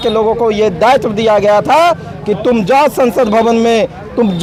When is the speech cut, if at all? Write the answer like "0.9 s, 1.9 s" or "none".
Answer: none